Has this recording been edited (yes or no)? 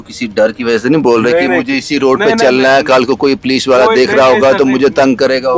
no